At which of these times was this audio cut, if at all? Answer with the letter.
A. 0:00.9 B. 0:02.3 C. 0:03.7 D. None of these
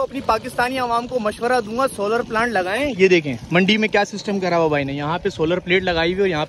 D